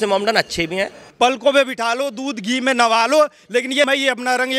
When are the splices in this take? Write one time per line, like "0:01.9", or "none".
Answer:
0:01.0